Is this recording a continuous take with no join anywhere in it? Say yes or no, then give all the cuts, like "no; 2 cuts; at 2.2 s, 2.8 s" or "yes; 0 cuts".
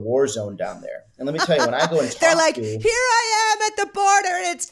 yes; 0 cuts